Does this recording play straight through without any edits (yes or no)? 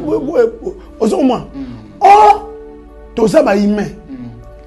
yes